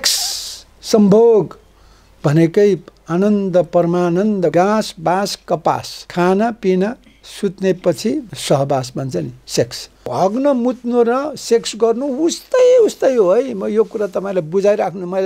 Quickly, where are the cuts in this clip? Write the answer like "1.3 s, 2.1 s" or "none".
4.5 s, 6.0 s, 8.3 s, 10.1 s